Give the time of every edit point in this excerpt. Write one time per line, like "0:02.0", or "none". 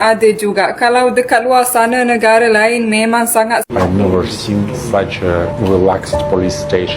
0:03.7

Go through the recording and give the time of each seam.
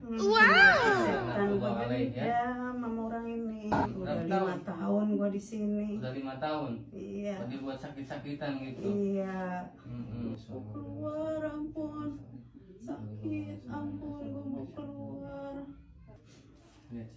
0:03.7
0:10.3

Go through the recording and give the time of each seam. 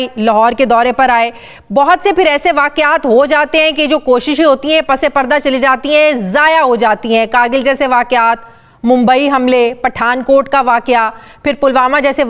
none

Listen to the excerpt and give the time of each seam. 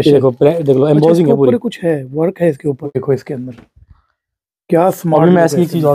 0:02.8

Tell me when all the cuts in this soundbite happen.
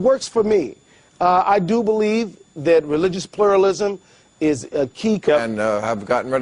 none

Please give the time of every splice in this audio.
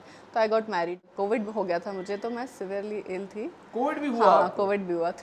0:01.1

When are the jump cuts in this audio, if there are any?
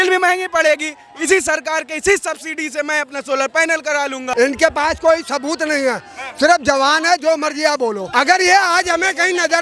0:04.2
0:08.0

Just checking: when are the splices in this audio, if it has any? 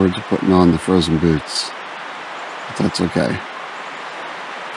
none

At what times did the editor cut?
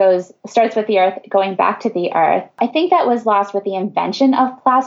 0:02.6

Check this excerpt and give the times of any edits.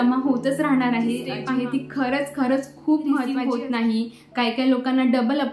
0:01.3
0:03.2

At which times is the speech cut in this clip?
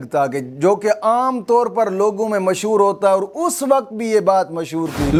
none

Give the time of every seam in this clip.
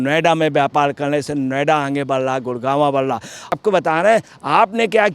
0:03.5

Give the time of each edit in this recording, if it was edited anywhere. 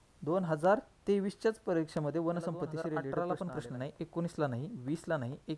0:03.1

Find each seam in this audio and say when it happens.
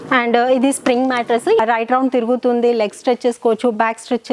0:01.6

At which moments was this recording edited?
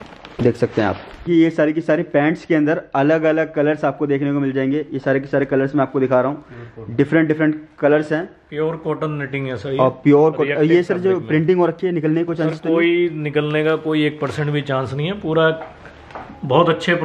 0:01.3

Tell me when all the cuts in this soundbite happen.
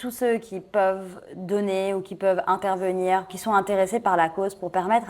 0:03.3

